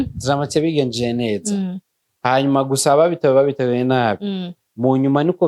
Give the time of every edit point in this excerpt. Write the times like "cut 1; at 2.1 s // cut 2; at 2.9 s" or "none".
none